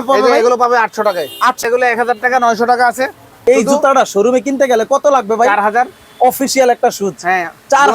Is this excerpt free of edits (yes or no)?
no